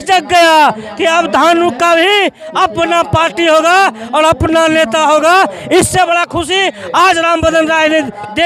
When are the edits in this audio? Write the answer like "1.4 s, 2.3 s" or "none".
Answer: none

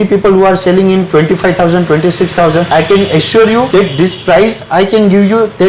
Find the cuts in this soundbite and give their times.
2.7 s, 3.7 s

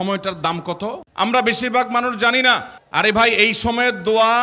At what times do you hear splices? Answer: 2.7 s

